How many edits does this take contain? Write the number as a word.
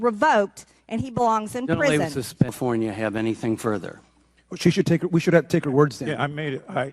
one